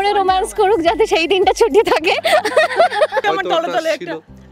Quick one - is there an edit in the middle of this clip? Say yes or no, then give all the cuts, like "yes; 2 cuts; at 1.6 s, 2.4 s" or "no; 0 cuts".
yes; 1 cut; at 3.2 s